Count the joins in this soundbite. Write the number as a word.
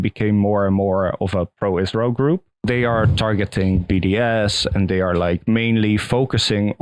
one